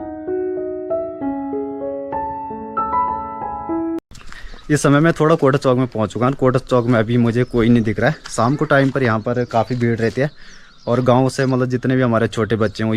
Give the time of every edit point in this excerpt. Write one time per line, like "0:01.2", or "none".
none